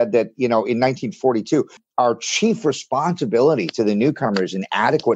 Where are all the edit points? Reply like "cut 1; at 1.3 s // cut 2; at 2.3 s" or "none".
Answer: cut 1; at 1.8 s